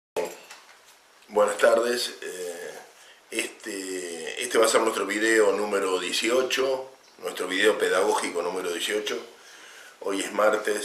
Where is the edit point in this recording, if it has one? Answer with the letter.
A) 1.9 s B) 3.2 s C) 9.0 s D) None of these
B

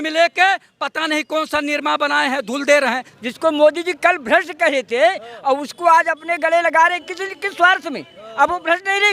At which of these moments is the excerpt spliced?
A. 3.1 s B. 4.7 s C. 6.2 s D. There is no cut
A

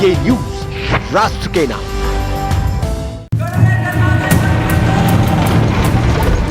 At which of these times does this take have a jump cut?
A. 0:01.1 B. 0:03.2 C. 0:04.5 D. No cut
B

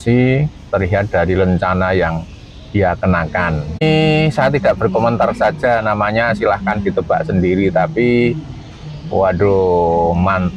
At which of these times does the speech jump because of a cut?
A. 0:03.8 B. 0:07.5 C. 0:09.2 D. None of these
A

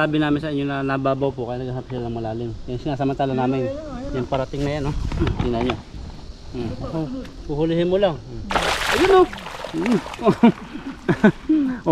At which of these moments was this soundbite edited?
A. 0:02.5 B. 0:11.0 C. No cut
C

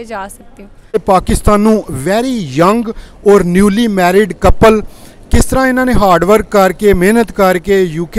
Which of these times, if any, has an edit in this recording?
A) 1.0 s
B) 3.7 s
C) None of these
A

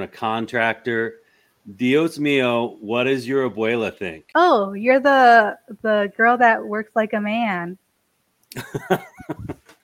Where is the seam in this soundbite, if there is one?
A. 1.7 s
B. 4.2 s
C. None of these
B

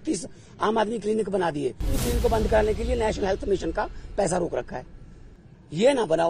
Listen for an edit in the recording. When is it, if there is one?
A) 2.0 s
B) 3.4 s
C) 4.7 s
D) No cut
A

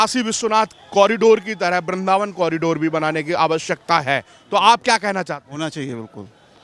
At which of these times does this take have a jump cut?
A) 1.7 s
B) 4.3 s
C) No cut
C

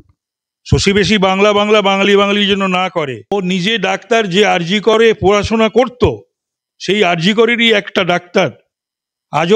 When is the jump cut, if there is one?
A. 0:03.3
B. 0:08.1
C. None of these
A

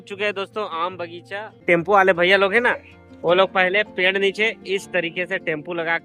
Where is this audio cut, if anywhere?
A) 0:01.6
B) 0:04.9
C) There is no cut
A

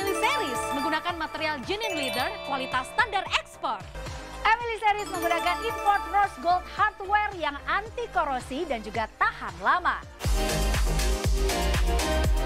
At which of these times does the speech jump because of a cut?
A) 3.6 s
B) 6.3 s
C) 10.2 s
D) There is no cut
D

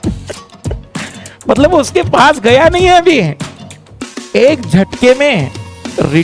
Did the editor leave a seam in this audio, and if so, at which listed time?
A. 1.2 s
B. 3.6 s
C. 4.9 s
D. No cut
D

